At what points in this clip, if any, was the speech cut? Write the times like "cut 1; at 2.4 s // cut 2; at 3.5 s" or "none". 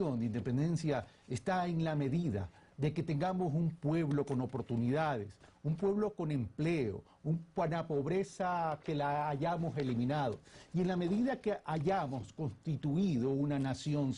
cut 1; at 5.4 s